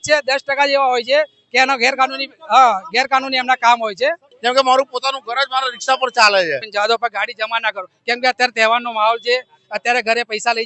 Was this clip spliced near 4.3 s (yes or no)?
yes